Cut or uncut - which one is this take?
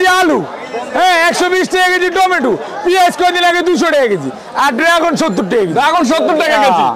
uncut